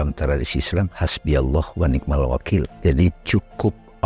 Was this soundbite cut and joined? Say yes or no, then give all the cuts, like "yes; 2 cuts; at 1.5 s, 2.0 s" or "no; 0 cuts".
yes; 1 cut; at 2.7 s